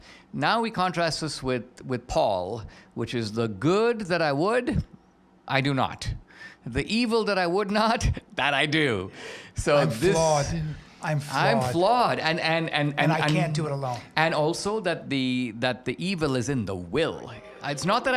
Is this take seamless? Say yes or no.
yes